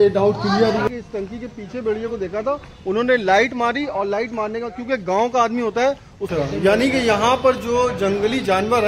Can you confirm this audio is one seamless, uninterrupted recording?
no; 2 cuts; at 0.9 s, 6.3 s

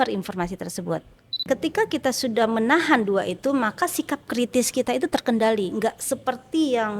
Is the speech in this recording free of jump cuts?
no; 1 cut; at 1.3 s

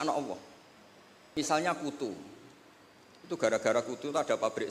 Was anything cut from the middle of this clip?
yes; 1 cut; at 1.4 s

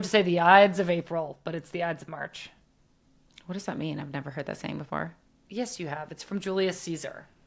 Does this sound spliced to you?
no; 0 cuts

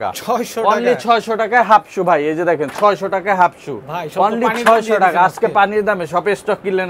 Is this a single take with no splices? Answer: yes; 0 cuts

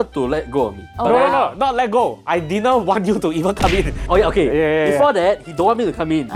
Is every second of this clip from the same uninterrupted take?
yes; 0 cuts

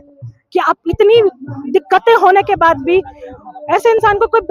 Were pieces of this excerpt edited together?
no; 0 cuts

